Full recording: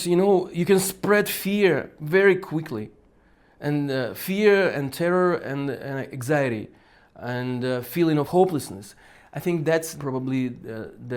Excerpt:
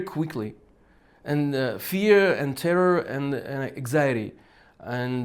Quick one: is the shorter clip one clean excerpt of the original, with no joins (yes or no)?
yes